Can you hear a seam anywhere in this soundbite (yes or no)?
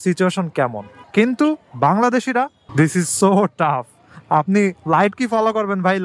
yes